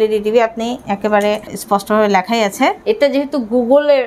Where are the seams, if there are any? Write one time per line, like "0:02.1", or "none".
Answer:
0:01.6
0:02.8